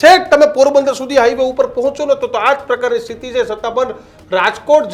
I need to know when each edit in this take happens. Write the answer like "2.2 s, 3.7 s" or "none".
none